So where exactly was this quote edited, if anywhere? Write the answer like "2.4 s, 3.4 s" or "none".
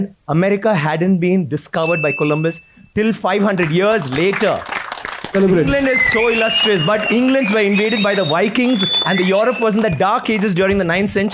5.3 s